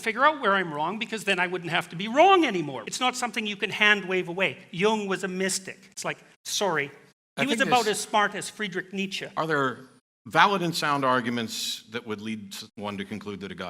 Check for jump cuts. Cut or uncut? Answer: cut